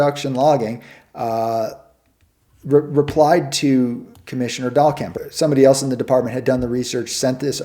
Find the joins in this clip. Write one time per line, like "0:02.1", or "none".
none

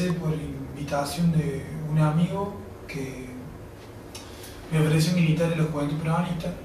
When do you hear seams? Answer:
0:03.4

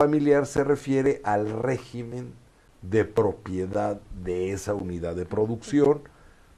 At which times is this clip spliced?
0:01.6

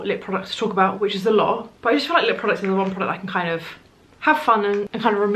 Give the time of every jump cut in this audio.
none

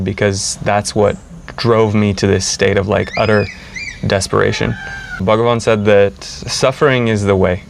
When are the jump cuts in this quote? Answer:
0:05.2

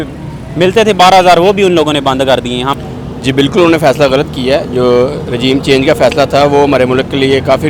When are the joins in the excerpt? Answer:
0:02.7

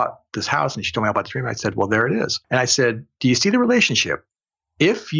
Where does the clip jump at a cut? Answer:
0:02.4

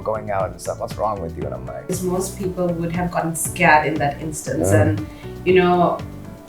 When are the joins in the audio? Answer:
0:01.8

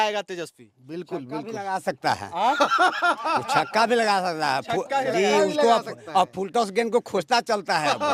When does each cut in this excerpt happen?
none

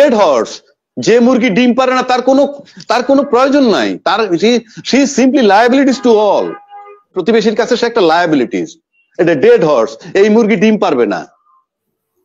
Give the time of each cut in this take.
0:07.1

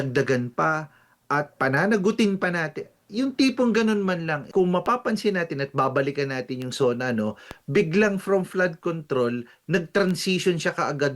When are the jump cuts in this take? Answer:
0:04.5

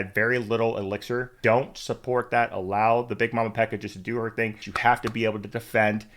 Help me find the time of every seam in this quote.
0:01.3
0:04.7

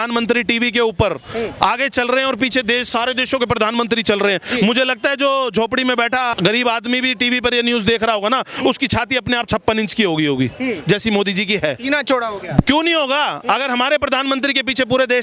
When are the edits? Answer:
0:06.3

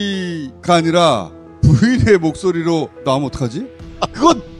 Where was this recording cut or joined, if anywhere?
none

